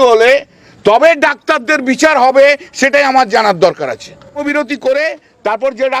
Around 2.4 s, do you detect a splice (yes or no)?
no